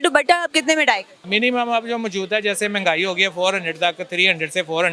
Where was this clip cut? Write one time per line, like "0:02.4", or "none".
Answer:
0:01.2